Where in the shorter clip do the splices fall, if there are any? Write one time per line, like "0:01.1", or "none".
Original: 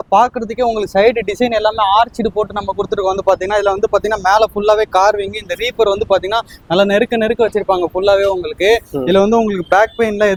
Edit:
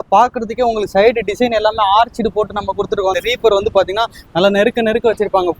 0:03.2